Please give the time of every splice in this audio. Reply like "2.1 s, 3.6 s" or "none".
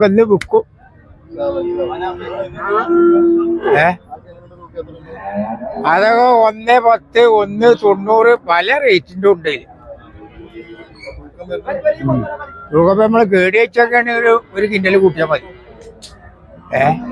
none